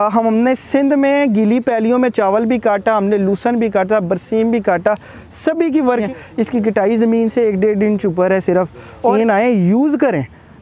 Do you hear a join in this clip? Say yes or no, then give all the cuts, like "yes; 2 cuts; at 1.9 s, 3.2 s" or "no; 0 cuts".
yes; 2 cuts; at 6.0 s, 9.1 s